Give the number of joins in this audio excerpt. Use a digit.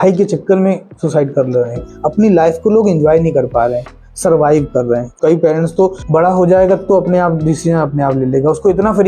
3